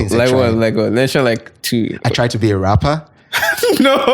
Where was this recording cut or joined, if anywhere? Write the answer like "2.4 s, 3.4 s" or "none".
none